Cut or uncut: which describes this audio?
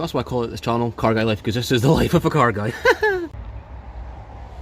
cut